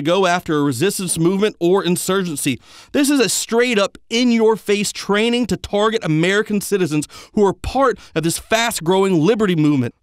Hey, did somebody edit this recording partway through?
no; 0 cuts

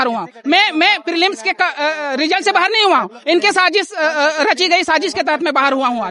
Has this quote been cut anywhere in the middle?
no; 0 cuts

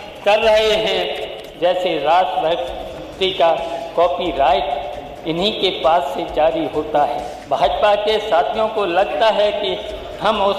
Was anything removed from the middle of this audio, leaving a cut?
yes; 2 cuts; at 1.4 s, 7.3 s

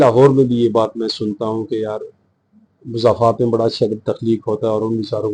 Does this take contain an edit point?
no; 0 cuts

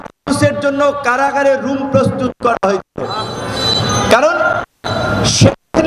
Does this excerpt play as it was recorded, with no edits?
yes; 0 cuts

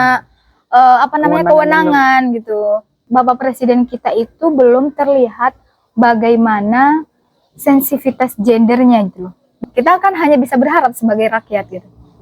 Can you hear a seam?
yes; 2 cuts; at 3.0 s, 9.4 s

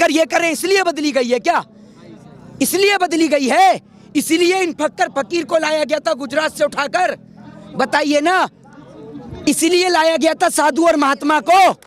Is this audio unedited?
yes; 0 cuts

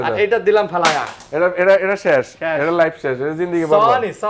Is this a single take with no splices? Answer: yes; 0 cuts

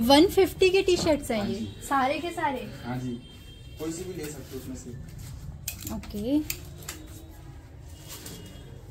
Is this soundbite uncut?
yes; 0 cuts

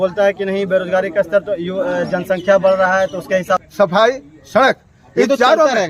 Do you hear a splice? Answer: yes; 1 cut; at 3.7 s

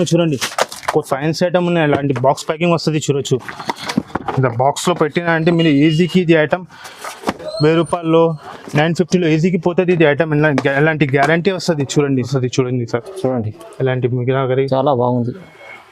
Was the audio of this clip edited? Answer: yes; 2 cuts; at 1.1 s, 12.1 s

